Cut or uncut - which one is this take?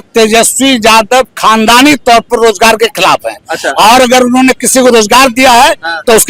uncut